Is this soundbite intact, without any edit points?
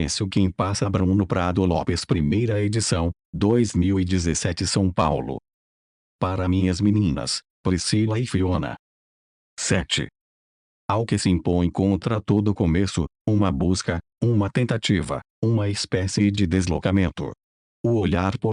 no; 1 cut; at 1.8 s

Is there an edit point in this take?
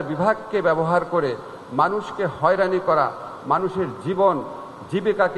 no; 0 cuts

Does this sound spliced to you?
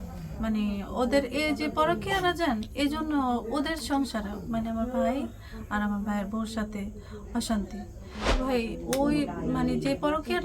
yes; 1 cut; at 8.3 s

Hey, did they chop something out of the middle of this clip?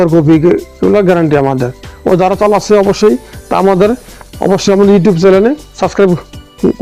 no; 0 cuts

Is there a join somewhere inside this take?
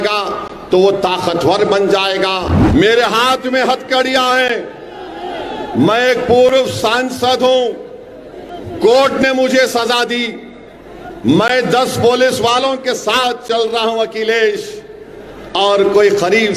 yes; 1 cut; at 2.6 s

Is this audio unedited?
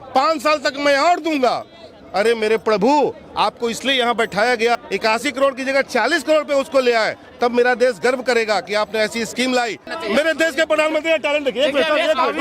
no; 2 cuts; at 4.8 s, 9.9 s

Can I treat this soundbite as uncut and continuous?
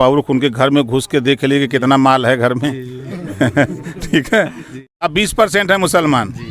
no; 1 cut; at 5.0 s

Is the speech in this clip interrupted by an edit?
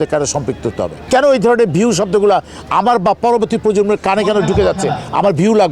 yes; 1 cut; at 1.0 s

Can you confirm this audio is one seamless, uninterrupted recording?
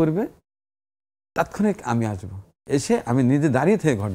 yes; 0 cuts

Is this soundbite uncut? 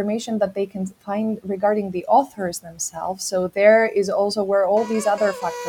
yes; 0 cuts

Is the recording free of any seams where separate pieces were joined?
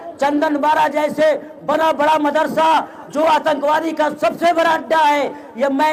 yes; 0 cuts

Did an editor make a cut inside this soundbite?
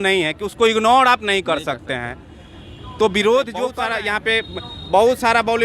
yes; 1 cut; at 3.8 s

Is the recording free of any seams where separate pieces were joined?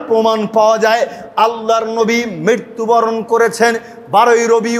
yes; 0 cuts

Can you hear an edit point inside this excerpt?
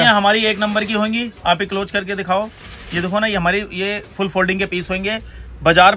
no; 0 cuts

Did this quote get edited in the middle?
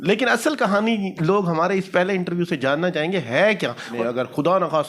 yes; 1 cut; at 3.9 s

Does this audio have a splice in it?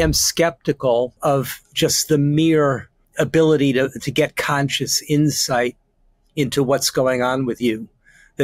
yes; 2 cuts; at 1.2 s, 3.0 s

